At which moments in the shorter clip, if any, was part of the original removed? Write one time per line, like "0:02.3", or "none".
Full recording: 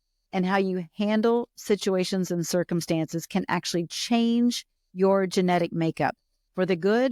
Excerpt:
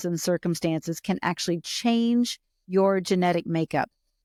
none